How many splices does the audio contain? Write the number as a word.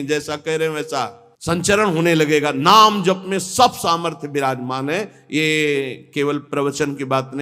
one